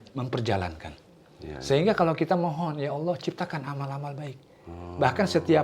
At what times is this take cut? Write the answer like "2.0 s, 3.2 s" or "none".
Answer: none

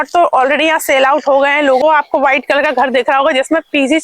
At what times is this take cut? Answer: 1.8 s

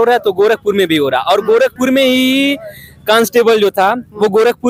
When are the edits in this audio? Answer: none

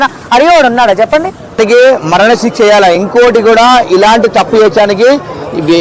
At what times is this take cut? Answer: 1.6 s

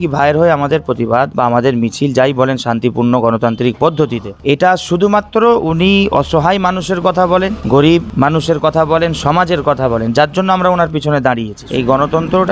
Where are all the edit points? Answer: 1.3 s, 7.6 s, 11.6 s

